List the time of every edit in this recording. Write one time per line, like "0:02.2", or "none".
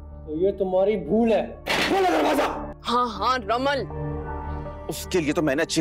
0:02.7